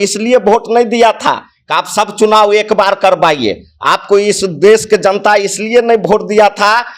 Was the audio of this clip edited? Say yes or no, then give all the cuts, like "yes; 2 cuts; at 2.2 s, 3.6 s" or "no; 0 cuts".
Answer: no; 0 cuts